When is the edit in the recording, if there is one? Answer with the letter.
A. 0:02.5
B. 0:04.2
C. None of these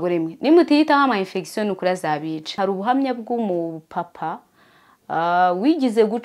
A